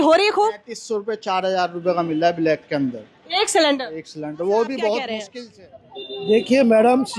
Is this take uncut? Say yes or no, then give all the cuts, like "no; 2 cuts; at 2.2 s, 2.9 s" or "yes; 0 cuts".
no; 1 cut; at 5.2 s